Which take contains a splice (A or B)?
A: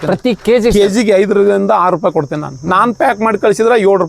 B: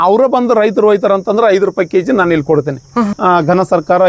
B